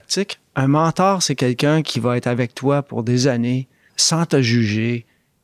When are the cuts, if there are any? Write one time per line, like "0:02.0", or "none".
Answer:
0:04.0

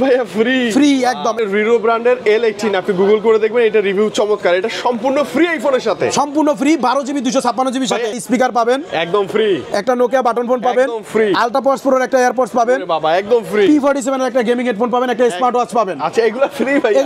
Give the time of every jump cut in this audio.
0:01.4
0:08.2

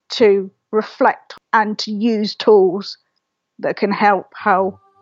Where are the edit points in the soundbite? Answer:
0:01.3

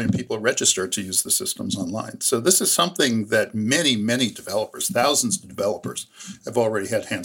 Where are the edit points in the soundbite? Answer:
none

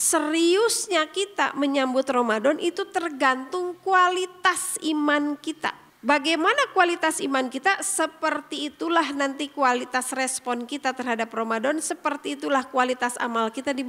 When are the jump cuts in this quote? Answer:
0:05.9

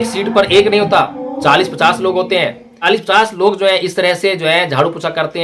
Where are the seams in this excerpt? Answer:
none

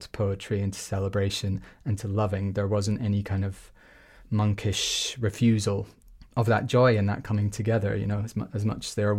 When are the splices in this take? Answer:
0:06.0

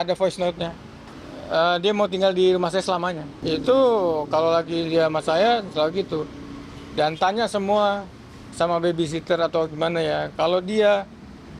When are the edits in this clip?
0:03.3

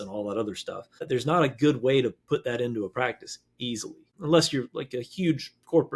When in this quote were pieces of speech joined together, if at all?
0:01.0
0:04.0

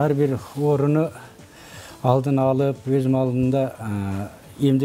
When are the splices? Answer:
none

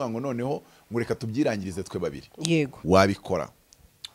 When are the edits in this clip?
0:02.8

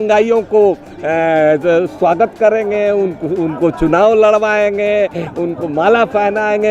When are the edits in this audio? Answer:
none

